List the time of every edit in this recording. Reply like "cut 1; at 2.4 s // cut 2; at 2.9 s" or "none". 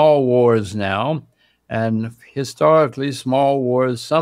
none